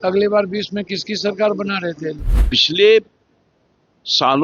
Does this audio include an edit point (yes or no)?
yes